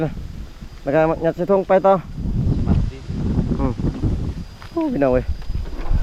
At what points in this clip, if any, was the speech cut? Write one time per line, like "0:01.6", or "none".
none